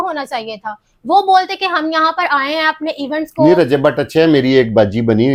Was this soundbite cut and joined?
no; 0 cuts

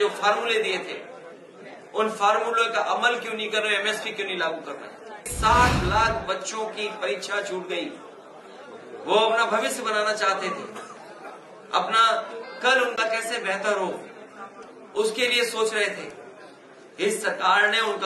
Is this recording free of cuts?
no; 1 cut; at 5.3 s

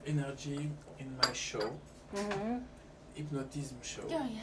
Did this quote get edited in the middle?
no; 0 cuts

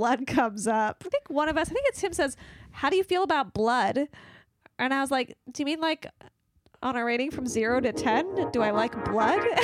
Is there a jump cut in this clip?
yes; 1 cut; at 1.1 s

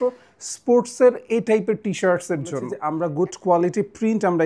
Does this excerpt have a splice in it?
yes; 1 cut; at 2.7 s

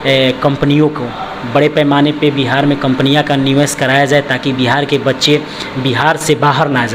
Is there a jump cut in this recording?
no; 0 cuts

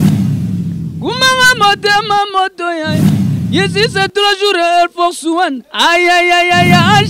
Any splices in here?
yes; 1 cut; at 0.9 s

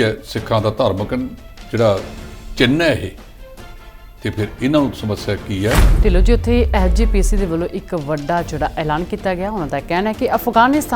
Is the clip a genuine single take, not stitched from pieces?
no; 1 cut; at 5.9 s

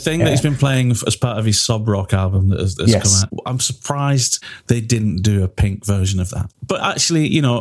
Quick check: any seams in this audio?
yes; 1 cut; at 6.4 s

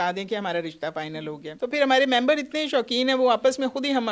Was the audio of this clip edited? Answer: yes; 1 cut; at 1.5 s

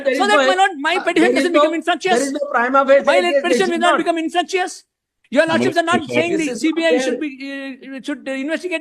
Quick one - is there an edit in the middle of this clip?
no; 0 cuts

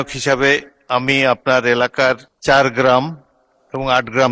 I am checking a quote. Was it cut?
yes; 1 cut; at 2.3 s

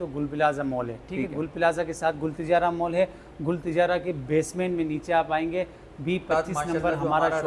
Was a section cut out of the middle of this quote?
no; 0 cuts

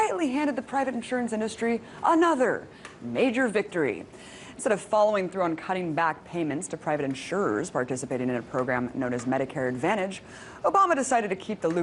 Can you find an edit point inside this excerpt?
yes; 1 cut; at 5.1 s

